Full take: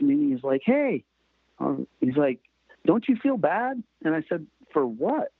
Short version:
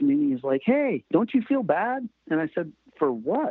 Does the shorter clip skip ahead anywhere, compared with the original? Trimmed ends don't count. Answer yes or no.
yes